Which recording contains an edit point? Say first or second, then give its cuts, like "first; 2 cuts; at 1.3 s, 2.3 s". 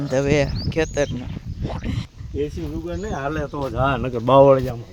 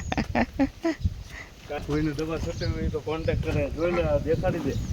second; 1 cut; at 1.8 s